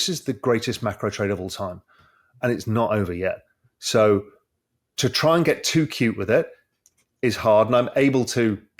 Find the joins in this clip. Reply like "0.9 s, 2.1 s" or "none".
none

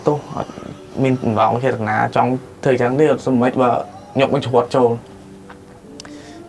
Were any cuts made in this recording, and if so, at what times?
none

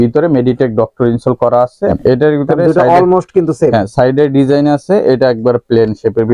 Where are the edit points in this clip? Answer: 2.0 s

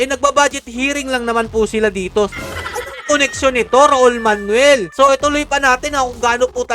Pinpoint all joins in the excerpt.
2.3 s, 4.9 s

